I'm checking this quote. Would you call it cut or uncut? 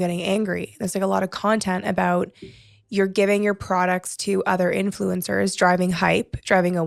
uncut